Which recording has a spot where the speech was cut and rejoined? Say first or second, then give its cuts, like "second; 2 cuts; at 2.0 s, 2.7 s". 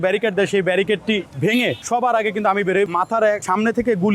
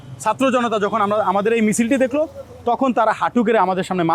first; 2 cuts; at 1.6 s, 3.2 s